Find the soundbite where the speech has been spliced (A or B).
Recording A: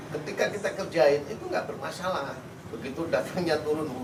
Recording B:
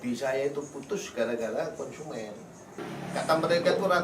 B